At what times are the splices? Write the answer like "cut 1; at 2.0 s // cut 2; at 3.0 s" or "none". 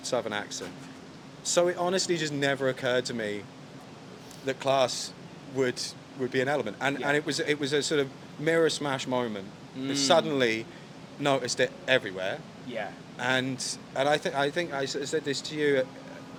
none